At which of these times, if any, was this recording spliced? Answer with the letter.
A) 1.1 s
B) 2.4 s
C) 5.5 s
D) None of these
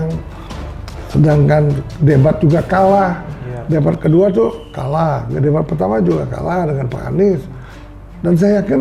D